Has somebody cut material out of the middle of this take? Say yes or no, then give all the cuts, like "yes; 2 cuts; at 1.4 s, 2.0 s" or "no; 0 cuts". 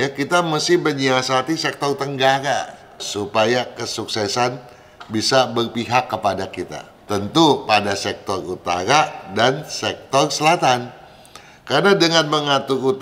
yes; 2 cuts; at 3.0 s, 6.9 s